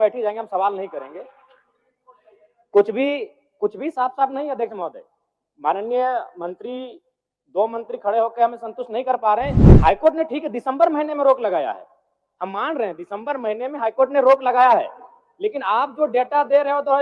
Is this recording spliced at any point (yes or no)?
no